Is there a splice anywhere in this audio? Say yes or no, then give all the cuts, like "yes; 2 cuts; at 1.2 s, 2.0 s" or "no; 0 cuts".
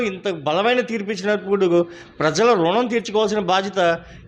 no; 0 cuts